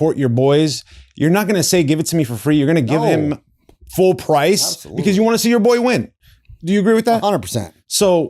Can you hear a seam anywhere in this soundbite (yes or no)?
no